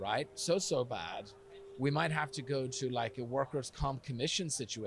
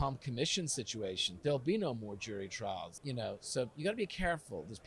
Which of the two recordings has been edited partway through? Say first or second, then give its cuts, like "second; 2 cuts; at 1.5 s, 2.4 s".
second; 1 cut; at 3.0 s